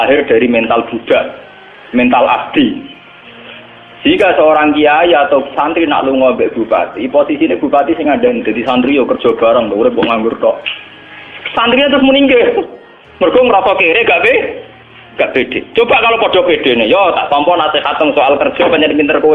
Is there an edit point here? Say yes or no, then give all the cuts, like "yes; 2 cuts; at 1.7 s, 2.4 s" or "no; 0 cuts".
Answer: no; 0 cuts